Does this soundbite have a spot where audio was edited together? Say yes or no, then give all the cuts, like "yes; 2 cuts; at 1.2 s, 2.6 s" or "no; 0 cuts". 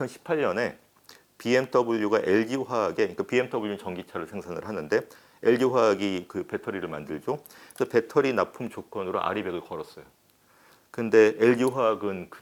no; 0 cuts